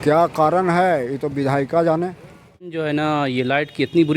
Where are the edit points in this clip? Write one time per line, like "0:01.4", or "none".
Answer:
0:02.7